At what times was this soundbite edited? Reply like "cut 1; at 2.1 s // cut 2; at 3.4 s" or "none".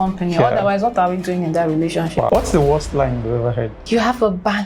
cut 1; at 2.3 s // cut 2; at 3.8 s